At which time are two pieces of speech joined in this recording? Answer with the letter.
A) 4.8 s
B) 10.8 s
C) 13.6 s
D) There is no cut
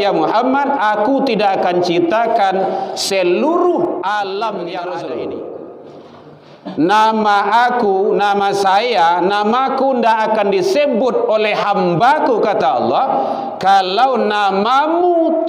A